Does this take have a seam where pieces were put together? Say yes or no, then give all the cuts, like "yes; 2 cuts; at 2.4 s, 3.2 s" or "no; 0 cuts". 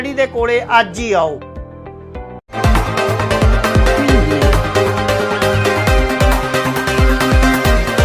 no; 0 cuts